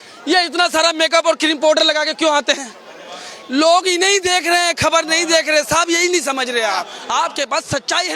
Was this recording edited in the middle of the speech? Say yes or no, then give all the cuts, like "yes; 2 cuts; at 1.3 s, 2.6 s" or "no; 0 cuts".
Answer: yes; 1 cut; at 6.9 s